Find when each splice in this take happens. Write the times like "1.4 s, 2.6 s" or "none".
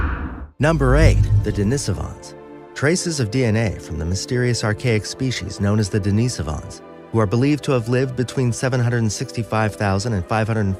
7.3 s